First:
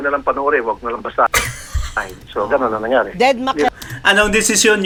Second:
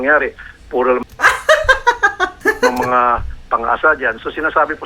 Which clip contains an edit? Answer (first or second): second